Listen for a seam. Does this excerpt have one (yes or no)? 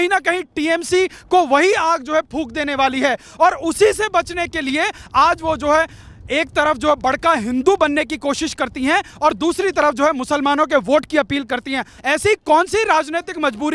yes